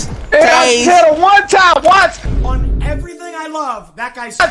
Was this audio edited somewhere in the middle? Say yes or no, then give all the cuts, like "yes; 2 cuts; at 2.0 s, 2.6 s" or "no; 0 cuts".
no; 0 cuts